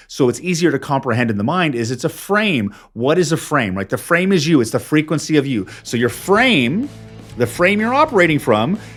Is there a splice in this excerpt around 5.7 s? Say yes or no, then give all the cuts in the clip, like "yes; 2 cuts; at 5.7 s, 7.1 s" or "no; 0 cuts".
no; 0 cuts